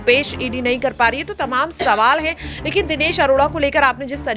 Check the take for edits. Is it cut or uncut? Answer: uncut